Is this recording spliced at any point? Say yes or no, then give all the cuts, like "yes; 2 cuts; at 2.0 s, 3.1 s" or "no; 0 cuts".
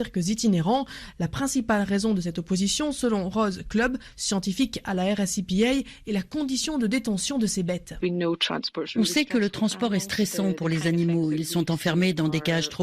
yes; 2 cuts; at 1.0 s, 7.9 s